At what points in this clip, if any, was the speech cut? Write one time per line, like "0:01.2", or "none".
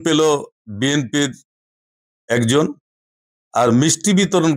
none